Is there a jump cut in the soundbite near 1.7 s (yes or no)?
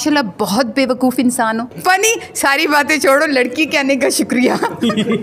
yes